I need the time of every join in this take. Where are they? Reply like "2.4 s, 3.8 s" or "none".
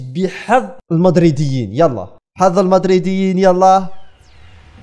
none